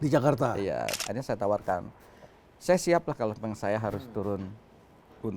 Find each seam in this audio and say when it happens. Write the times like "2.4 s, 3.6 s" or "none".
1.0 s